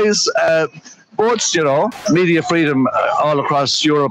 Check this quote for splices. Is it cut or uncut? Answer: cut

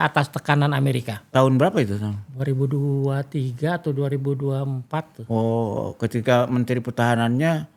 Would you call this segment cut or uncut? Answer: uncut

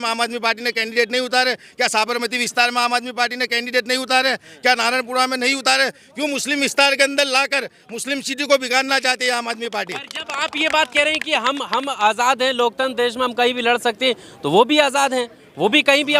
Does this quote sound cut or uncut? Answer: uncut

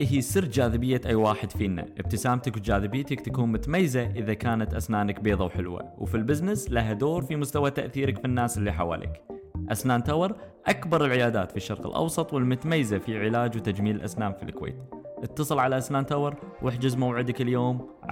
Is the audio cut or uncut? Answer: uncut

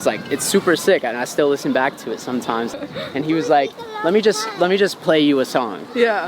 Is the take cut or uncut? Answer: cut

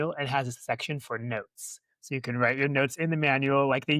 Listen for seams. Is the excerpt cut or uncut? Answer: uncut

